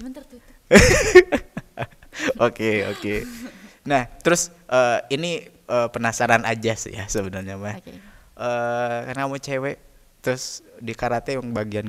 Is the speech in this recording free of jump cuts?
yes; 0 cuts

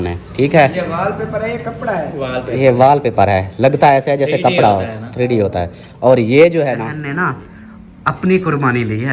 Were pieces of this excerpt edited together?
yes; 1 cut; at 7.0 s

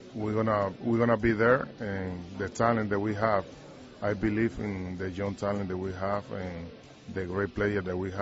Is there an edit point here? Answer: no; 0 cuts

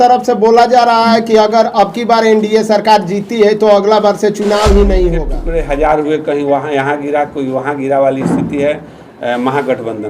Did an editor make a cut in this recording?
yes; 1 cut; at 5.3 s

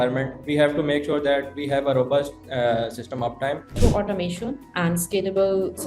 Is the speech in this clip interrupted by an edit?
yes; 1 cut; at 3.7 s

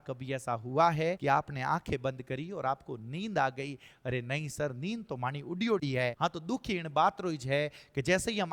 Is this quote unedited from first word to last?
no; 2 cuts; at 1.2 s, 6.1 s

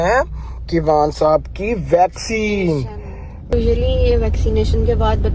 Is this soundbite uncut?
no; 1 cut; at 3.5 s

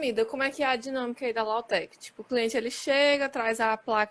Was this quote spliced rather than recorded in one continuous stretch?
no; 0 cuts

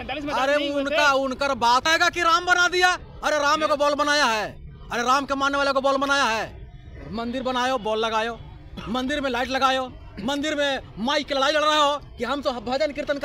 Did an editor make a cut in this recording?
yes; 1 cut; at 1.8 s

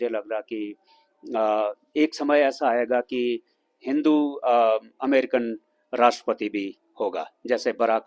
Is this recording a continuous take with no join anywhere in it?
yes; 0 cuts

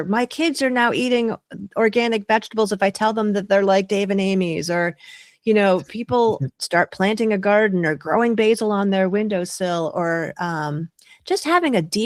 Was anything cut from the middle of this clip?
no; 0 cuts

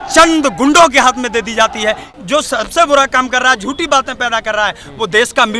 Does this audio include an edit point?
yes; 1 cut; at 2.1 s

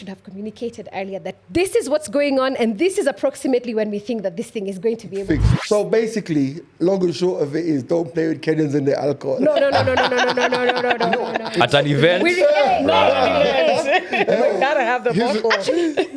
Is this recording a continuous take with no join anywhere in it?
no; 1 cut; at 5.5 s

